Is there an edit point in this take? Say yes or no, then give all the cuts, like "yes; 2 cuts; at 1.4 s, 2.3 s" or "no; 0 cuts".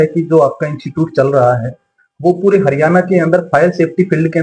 no; 0 cuts